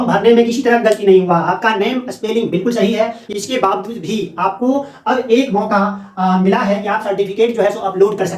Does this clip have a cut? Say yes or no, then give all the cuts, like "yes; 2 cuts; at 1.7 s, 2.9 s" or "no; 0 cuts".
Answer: yes; 1 cut; at 3.2 s